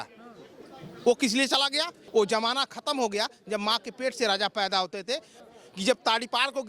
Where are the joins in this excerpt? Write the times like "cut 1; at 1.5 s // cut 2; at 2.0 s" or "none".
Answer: cut 1; at 2.0 s // cut 2; at 5.4 s